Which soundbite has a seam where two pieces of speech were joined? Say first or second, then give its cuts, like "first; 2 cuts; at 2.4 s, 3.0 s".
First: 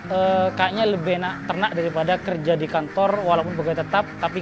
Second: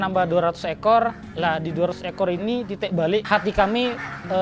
second; 1 cut; at 3.2 s